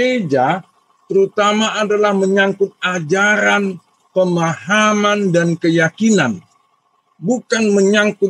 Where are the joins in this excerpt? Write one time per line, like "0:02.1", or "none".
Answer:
none

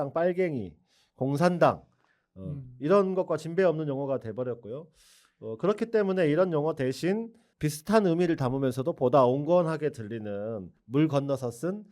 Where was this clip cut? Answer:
0:07.4
0:10.8

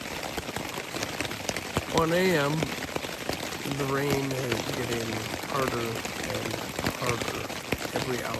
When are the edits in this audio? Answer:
none

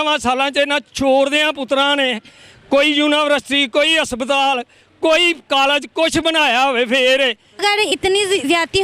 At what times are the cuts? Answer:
0:07.6

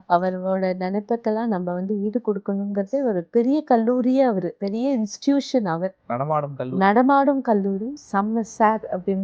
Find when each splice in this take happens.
0:03.2
0:04.6
0:08.0

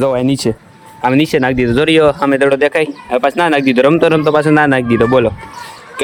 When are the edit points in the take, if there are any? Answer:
none

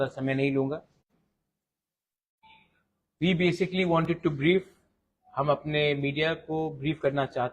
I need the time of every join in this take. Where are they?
0:03.9

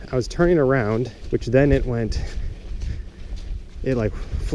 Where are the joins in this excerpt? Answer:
0:01.2

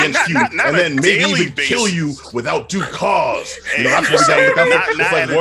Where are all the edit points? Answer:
none

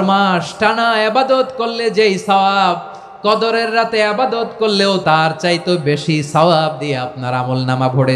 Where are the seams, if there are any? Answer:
0:05.0

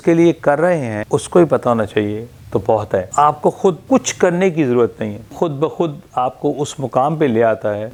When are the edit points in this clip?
none

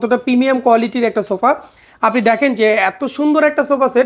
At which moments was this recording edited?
none

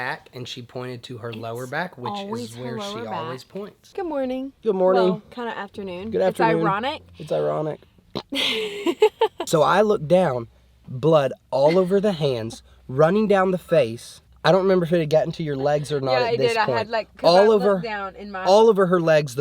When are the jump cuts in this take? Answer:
0:03.8
0:09.4

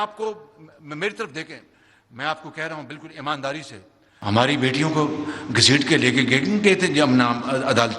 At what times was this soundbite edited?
0:04.1

